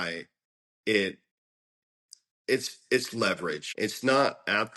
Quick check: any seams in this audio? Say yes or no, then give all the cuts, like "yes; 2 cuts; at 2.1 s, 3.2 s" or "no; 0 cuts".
yes; 1 cut; at 3.6 s